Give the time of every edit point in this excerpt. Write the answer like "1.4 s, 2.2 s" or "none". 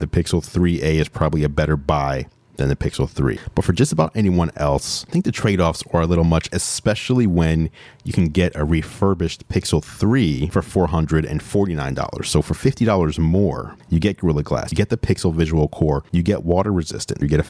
3.4 s, 16.0 s